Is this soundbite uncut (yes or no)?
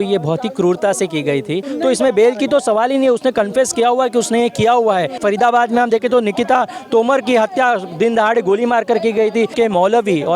no